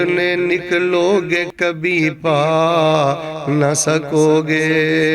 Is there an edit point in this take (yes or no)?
no